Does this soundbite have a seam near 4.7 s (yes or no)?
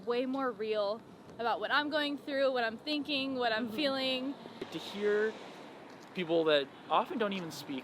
yes